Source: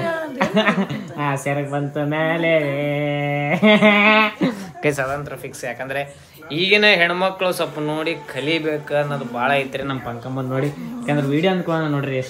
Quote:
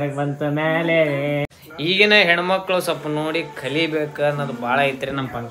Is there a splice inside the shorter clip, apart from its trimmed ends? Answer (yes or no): yes